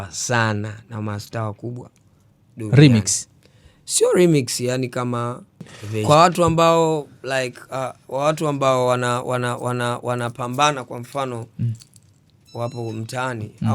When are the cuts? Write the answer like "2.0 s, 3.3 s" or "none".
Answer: 6.0 s